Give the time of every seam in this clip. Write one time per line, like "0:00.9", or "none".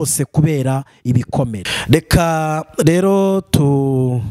0:01.7

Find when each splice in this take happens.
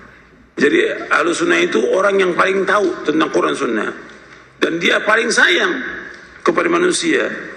none

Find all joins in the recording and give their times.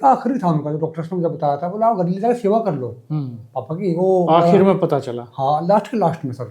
none

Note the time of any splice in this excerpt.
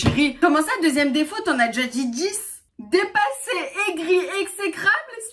0:02.7

